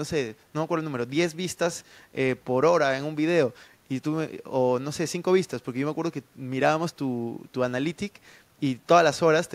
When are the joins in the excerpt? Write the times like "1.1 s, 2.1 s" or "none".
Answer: none